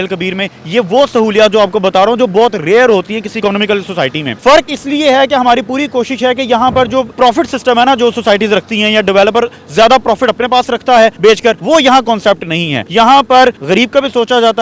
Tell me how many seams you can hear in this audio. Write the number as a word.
zero